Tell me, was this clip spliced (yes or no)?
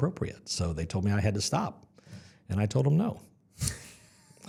no